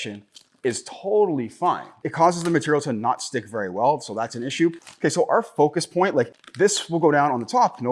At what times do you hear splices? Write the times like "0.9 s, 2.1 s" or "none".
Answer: 2.0 s, 6.4 s